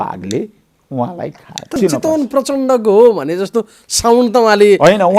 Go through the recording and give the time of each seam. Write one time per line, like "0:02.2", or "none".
0:01.8